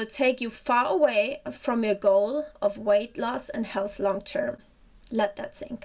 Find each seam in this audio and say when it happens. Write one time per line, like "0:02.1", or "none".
none